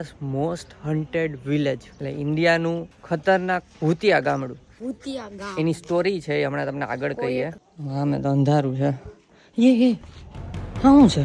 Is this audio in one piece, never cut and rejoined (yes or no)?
no